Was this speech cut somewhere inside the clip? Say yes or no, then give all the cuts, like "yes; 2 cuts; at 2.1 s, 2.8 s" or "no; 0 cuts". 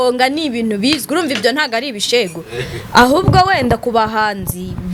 no; 0 cuts